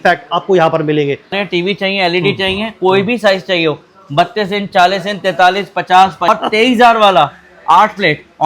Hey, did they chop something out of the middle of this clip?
yes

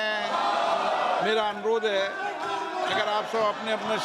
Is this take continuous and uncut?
no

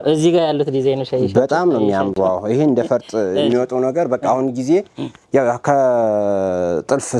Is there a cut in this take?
no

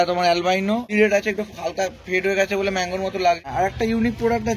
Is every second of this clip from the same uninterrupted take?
no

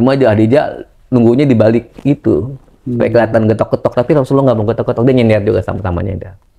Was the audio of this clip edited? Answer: no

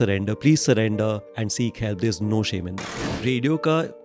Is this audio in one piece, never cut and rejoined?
no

